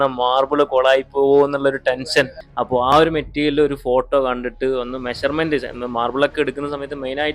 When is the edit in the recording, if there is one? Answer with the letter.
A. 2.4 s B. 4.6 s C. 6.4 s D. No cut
A